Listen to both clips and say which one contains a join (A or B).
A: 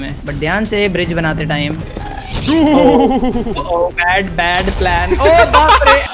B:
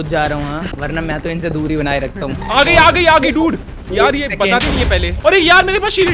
B